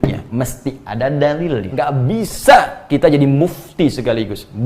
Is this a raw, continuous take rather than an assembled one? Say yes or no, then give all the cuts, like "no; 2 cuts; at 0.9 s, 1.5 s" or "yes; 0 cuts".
no; 1 cut; at 1.7 s